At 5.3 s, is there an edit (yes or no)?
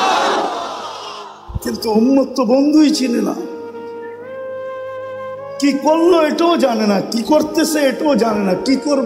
yes